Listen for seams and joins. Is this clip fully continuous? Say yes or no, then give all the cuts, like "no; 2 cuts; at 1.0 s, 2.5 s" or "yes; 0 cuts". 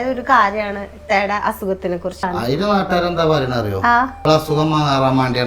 no; 2 cuts; at 2.2 s, 4.1 s